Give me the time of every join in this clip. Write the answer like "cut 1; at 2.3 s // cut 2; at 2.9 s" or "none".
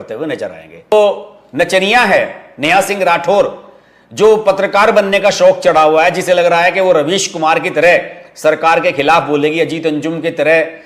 none

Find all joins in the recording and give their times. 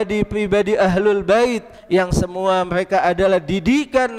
cut 1; at 1.7 s

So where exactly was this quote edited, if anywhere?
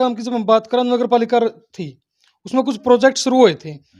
none

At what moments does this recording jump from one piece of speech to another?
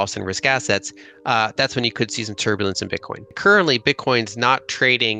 cut 1; at 3.3 s

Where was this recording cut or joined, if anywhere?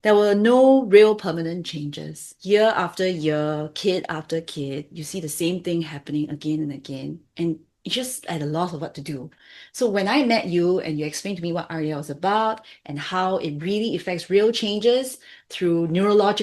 cut 1; at 2.3 s

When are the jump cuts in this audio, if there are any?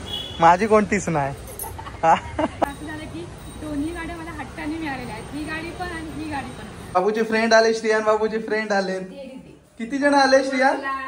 cut 1; at 2.6 s // cut 2; at 7.0 s

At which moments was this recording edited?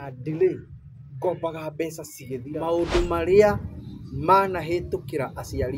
cut 1; at 2.6 s

